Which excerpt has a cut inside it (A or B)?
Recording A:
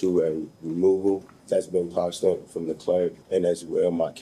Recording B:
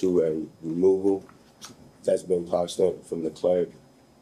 A